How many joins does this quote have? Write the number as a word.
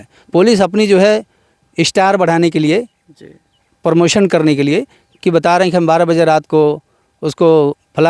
zero